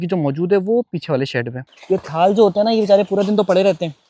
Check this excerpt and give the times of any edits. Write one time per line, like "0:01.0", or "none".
0:01.7